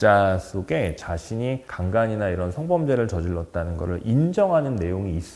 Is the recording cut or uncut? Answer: uncut